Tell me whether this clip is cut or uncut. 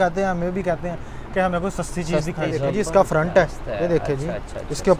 cut